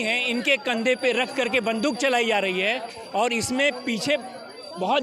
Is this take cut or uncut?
uncut